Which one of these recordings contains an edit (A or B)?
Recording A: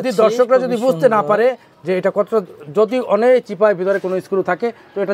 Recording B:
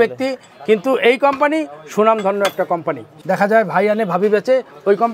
B